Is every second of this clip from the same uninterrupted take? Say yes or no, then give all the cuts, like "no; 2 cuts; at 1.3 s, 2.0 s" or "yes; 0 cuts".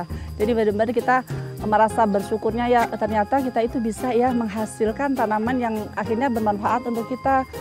yes; 0 cuts